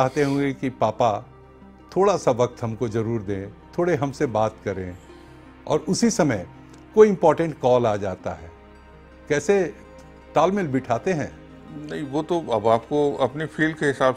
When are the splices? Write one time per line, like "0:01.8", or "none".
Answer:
none